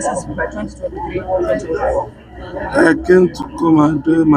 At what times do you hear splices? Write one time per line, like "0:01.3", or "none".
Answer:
none